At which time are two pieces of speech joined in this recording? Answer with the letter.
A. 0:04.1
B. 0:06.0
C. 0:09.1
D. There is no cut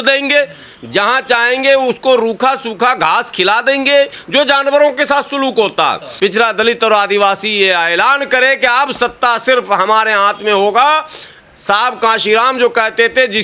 B